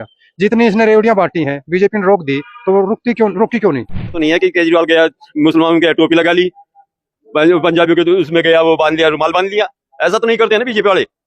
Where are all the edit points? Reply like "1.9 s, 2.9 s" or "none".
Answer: 4.1 s